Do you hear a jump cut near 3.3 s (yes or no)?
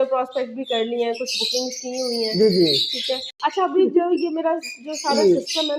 yes